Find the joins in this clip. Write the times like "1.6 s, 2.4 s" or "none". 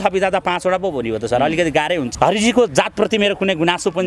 2.1 s